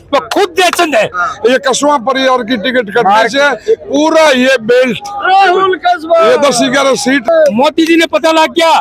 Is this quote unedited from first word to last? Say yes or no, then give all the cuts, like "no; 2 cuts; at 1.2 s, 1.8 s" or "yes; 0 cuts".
no; 2 cuts; at 1.2 s, 7.3 s